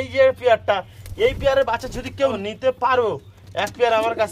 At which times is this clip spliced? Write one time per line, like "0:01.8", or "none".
0:02.4